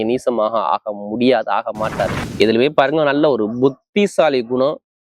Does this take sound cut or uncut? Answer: cut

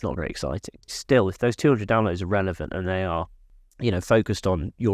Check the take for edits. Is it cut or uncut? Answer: cut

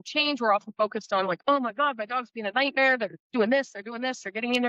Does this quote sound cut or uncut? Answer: uncut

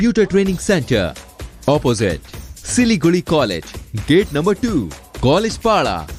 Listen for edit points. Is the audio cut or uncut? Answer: uncut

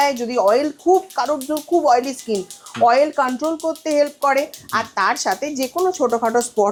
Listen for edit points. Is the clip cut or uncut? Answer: uncut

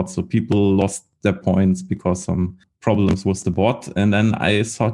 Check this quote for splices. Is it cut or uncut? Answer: cut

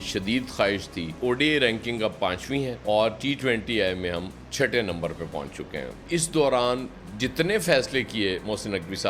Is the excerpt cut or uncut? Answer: cut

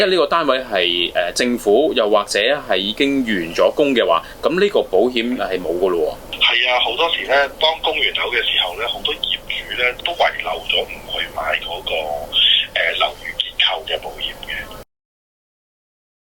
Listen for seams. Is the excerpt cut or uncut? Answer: uncut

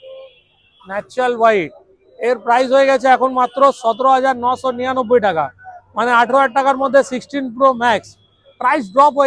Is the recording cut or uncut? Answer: uncut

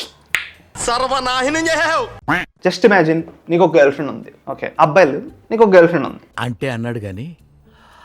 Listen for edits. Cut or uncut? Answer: uncut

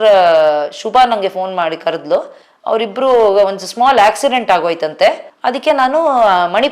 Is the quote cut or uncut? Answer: uncut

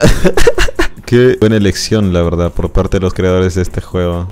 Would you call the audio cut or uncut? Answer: cut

